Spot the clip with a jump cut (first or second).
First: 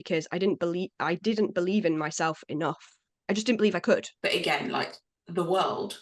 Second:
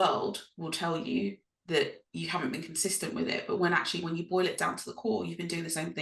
first